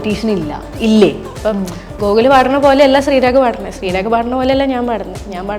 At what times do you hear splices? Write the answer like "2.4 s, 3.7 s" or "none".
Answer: 1.4 s